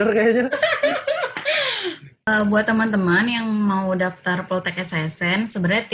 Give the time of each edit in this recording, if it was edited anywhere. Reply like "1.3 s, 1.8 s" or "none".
2.3 s